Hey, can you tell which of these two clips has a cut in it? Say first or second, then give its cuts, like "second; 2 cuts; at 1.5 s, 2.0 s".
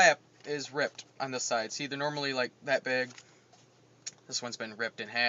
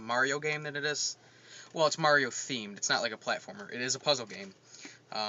second; 1 cut; at 4.0 s